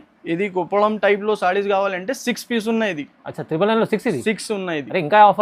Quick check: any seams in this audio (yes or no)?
no